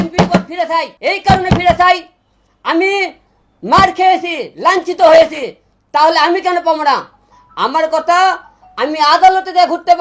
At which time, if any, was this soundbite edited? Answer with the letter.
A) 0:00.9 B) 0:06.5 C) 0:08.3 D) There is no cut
A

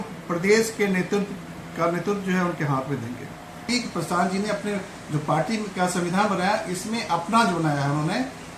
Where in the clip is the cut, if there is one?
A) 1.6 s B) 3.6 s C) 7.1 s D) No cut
B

